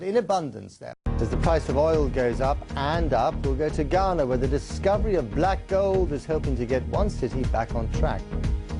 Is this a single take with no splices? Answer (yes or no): yes